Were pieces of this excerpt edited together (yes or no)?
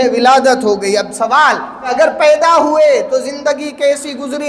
yes